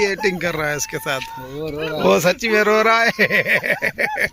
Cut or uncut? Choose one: uncut